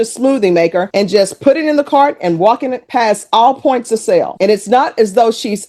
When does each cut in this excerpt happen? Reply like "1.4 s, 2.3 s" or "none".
none